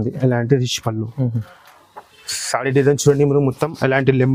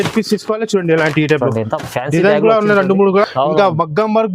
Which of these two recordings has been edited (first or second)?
second